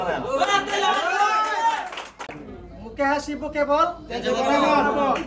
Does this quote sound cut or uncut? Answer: cut